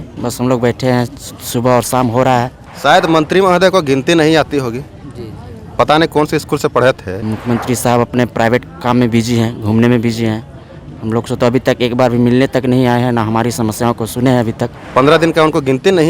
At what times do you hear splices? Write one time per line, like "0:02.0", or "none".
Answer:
0:02.6
0:07.2
0:14.8